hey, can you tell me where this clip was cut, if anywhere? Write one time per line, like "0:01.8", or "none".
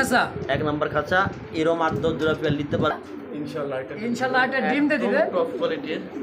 0:02.9

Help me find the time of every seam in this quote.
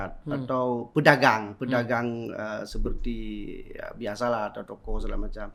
none

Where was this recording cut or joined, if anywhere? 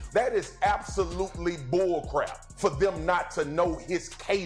0:02.4

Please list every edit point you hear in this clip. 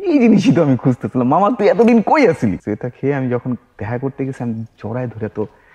0:02.6

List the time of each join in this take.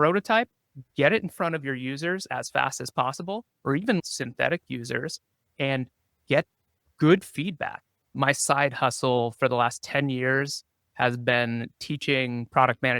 0:03.5
0:08.0

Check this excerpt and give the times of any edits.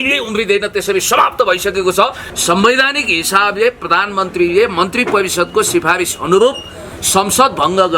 0:02.2

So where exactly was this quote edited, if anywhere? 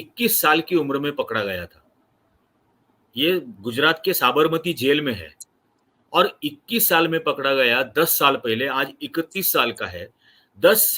none

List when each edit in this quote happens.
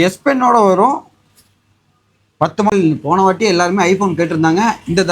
0:02.7

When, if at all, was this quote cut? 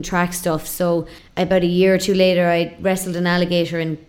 0:01.2

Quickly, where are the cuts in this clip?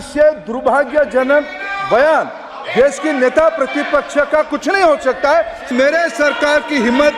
0:05.7

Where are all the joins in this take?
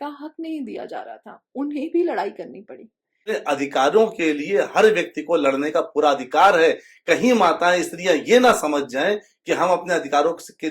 0:03.2

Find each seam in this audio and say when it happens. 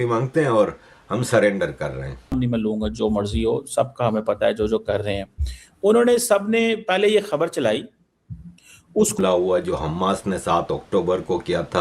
0:02.3
0:09.2

